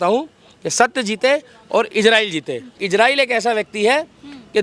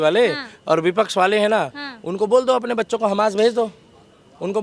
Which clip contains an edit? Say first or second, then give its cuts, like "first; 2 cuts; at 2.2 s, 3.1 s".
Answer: first; 1 cut; at 2.8 s